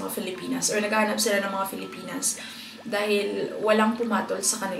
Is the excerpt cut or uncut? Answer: uncut